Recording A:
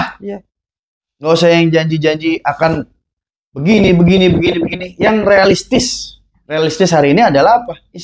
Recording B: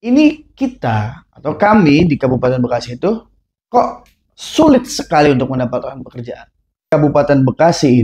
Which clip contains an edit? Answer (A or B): B